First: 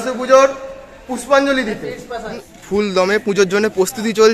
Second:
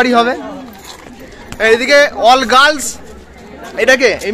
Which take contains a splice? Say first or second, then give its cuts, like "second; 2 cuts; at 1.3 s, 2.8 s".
first; 1 cut; at 2.5 s